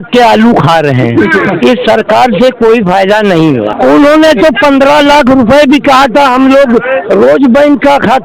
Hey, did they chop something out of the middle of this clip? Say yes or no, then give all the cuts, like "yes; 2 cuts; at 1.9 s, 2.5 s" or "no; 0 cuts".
yes; 1 cut; at 3.7 s